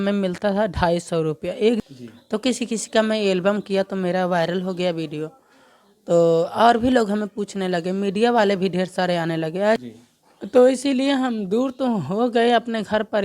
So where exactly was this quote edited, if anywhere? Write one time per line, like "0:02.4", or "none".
0:01.8
0:09.8